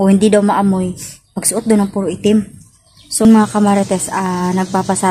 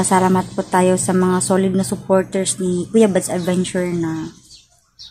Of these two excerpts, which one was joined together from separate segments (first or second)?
first